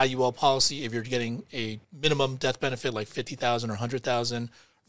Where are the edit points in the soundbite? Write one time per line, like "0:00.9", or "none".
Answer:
0:01.8